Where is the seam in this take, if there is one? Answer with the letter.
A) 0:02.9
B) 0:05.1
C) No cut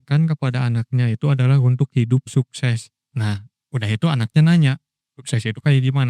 C